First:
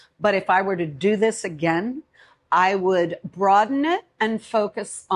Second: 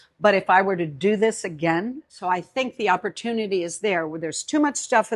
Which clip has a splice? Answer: second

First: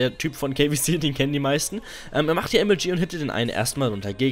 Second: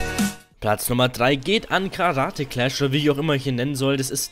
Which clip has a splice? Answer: second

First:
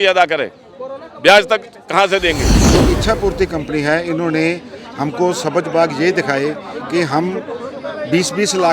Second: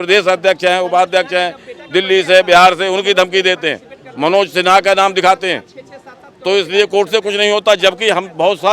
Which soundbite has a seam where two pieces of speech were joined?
first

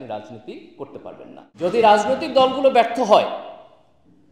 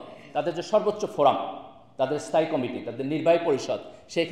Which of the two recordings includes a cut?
first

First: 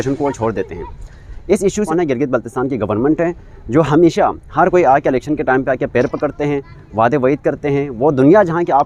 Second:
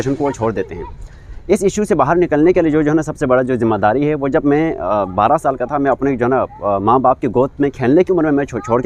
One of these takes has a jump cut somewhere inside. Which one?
first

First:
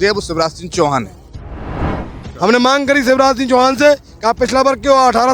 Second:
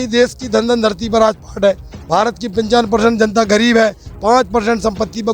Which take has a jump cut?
first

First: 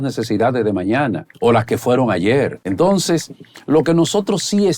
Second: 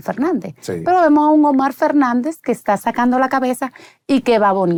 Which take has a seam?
first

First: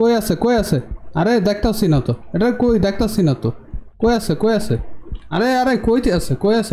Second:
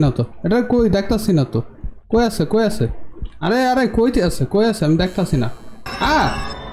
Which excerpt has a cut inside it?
first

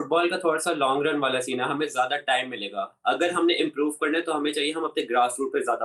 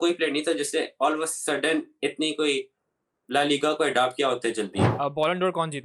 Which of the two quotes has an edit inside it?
second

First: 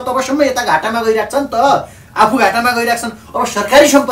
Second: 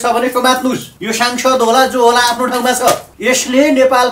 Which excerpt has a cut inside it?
second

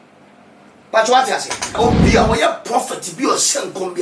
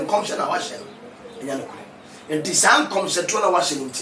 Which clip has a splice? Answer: first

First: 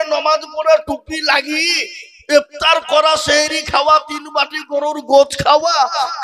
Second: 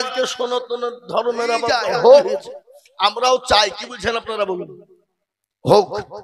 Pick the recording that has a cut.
second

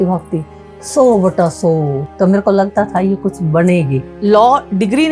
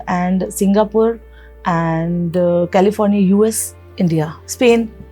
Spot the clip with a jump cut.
first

